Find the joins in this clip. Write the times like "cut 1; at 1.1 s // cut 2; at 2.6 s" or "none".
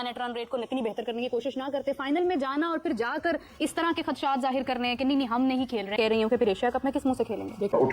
none